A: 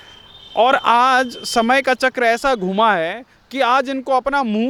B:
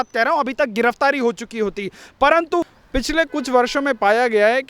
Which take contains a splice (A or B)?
B